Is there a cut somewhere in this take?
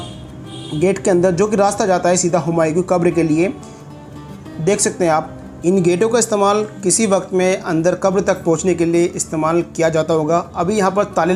no; 0 cuts

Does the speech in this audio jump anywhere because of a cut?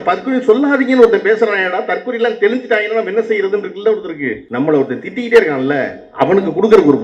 yes; 1 cut; at 4.4 s

